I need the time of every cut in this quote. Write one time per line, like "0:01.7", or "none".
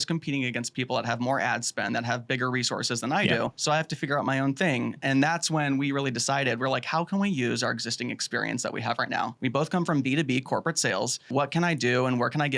0:03.6
0:09.3
0:11.3

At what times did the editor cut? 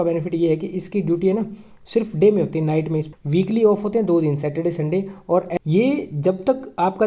0:03.1
0:05.6

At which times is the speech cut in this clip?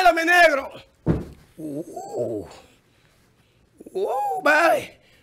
none

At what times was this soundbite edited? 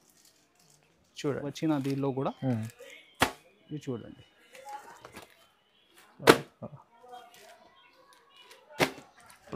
0:01.5

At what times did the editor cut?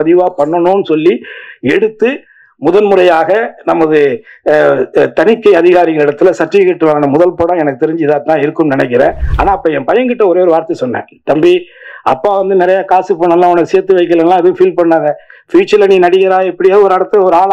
0:09.3

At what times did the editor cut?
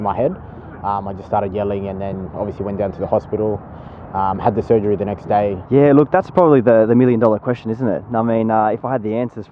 0:05.6

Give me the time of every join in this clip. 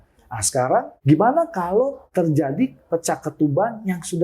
0:00.9
0:02.0

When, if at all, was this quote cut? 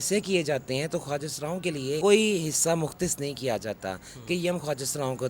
0:02.0

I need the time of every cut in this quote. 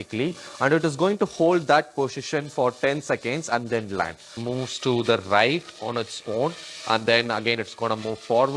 0:04.4

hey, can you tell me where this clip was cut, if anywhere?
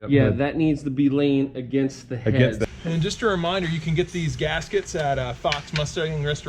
0:02.7

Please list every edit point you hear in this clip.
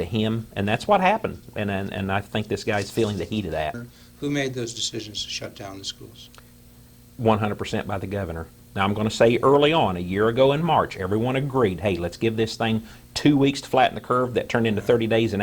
0:03.7

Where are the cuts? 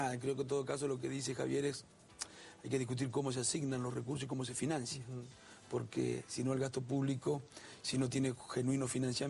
none

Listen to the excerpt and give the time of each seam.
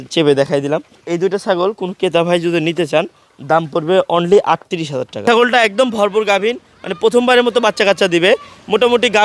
0:00.9
0:05.2

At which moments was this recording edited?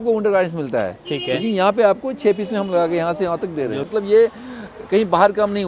0:03.8

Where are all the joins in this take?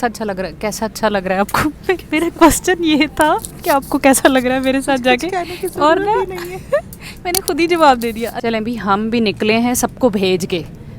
0:08.3

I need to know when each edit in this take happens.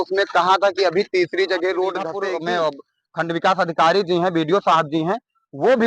0:02.2

